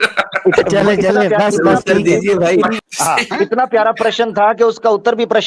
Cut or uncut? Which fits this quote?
cut